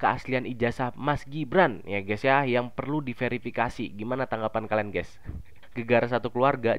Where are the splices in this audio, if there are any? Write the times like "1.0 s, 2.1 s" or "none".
5.6 s